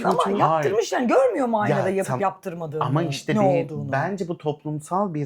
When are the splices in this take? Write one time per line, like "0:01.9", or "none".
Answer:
none